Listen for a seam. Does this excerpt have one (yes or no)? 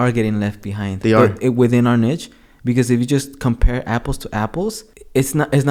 no